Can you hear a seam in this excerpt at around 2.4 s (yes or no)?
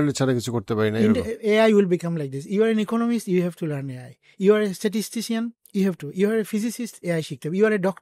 no